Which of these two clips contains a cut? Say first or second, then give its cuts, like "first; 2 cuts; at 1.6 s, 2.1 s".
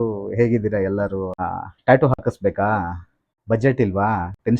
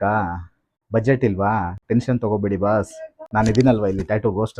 first; 1 cut; at 1.4 s